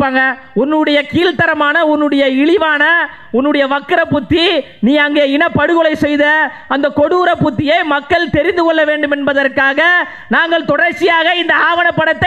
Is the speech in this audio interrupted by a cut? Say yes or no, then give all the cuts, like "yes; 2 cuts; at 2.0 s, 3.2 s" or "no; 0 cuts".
no; 0 cuts